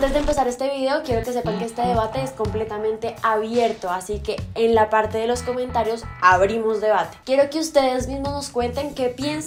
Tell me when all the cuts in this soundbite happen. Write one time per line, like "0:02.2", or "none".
none